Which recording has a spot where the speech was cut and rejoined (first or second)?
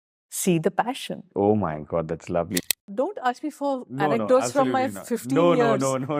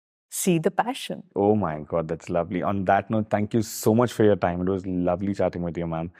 first